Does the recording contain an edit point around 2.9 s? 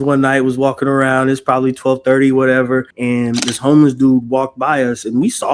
yes; 1 cut; at 2.9 s

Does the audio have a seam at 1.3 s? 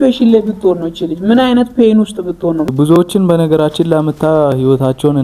no; 1 cut; at 2.7 s

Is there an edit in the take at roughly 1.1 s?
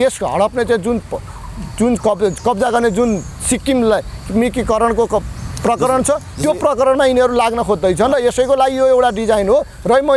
no; 0 cuts

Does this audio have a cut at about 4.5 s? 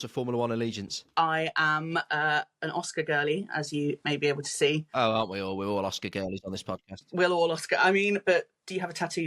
no; 1 cut; at 1.0 s

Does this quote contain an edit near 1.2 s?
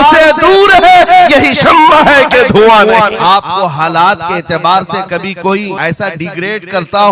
no; 2 cuts; at 3.2 s, 5.7 s

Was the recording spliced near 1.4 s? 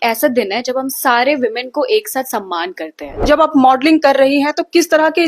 no; 1 cut; at 3.2 s

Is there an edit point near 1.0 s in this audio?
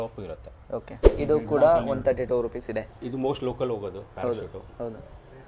yes; 1 cut; at 1.0 s

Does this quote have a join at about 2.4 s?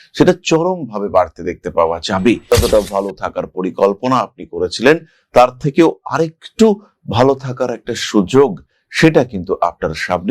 yes; 1 cut; at 2.4 s

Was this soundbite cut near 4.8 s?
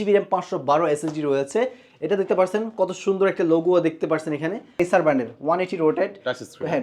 yes; 1 cut; at 4.8 s

